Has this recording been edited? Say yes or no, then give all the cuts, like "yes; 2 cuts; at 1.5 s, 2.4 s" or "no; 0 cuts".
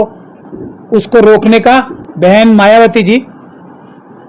yes; 1 cut; at 2.0 s